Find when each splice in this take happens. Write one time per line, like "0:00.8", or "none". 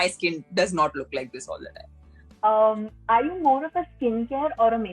none